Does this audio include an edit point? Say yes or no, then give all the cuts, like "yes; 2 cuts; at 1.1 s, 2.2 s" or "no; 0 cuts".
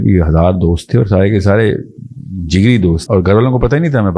yes; 1 cut; at 3.0 s